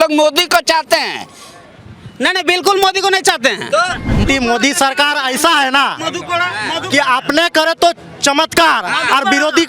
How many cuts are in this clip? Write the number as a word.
one